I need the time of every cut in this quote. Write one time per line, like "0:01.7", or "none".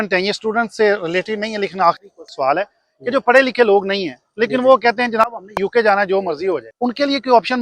0:06.7